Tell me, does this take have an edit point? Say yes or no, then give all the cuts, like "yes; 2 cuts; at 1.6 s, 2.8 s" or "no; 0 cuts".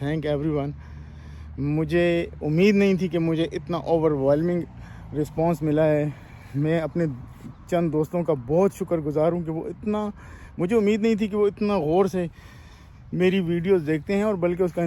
no; 0 cuts